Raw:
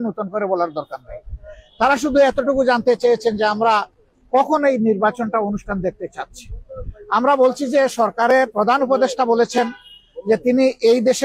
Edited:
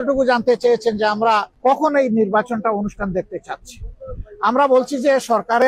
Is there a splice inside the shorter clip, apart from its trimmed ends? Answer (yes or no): yes